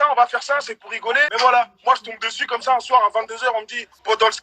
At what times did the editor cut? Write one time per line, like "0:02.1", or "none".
0:01.3